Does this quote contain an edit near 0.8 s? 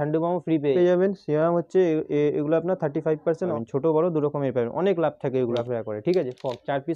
yes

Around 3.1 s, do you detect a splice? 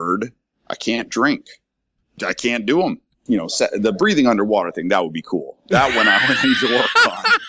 yes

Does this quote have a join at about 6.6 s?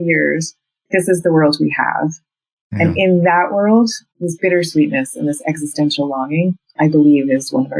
yes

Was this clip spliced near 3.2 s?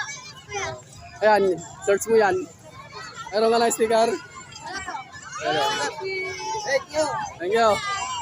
yes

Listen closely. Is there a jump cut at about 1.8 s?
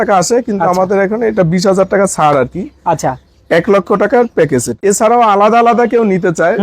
no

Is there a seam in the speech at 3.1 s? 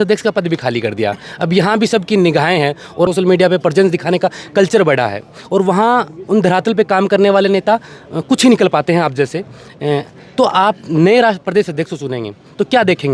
yes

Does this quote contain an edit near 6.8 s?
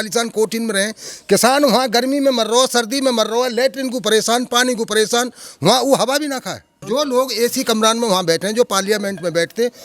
yes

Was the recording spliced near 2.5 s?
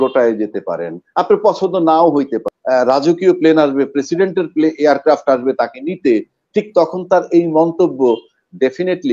yes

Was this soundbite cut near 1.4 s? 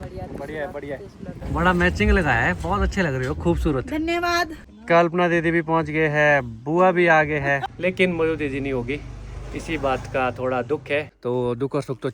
yes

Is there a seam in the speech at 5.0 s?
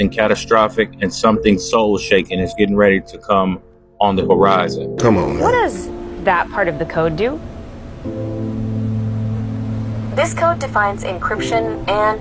yes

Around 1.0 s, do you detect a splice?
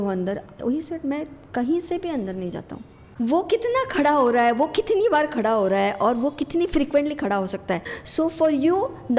no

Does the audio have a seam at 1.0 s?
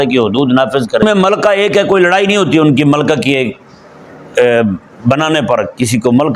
yes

